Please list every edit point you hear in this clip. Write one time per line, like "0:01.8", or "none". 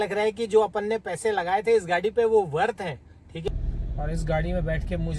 0:03.5